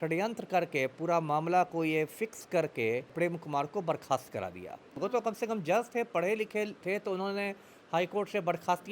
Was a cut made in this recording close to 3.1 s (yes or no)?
yes